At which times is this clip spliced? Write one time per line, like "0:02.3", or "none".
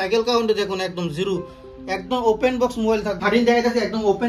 0:03.2